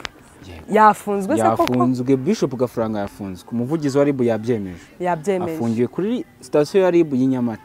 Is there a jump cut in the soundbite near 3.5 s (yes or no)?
no